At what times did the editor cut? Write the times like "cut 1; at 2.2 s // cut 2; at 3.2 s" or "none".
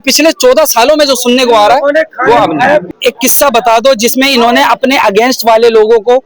cut 1; at 2.9 s